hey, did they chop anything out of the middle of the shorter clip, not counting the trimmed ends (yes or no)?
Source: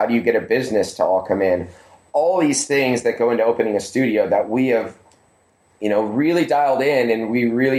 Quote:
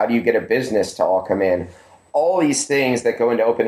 no